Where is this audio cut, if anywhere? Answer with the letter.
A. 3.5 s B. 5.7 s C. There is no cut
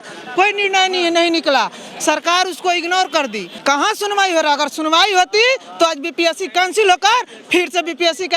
A